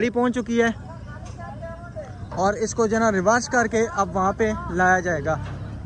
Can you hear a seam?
no; 0 cuts

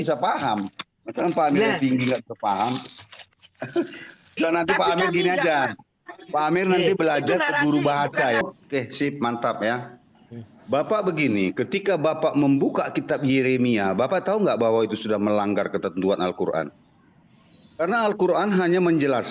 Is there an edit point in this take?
yes; 1 cut; at 8.4 s

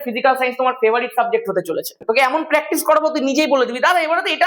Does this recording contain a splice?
yes; 1 cut; at 2.0 s

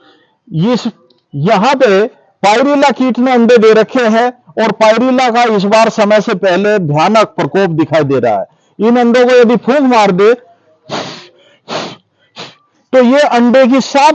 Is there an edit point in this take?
no; 0 cuts

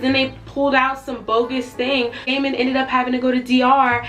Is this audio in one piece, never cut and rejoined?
no; 1 cut; at 2.3 s

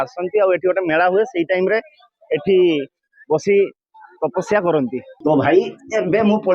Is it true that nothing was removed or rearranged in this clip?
no; 1 cut; at 5.1 s

